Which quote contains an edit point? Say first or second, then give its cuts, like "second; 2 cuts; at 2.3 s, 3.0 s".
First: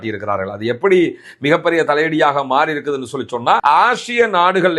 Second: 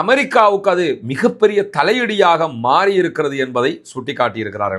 first; 1 cut; at 3.6 s